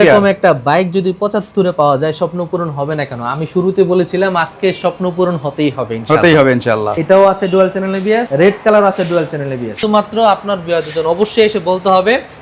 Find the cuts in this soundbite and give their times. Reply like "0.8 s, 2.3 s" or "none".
6.9 s, 9.8 s